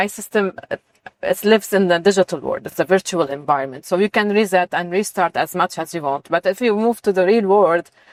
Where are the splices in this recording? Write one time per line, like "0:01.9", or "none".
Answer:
none